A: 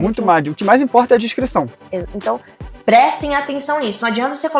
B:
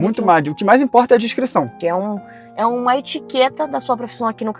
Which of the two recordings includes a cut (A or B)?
B